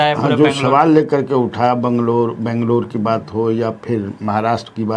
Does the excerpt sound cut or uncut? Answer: uncut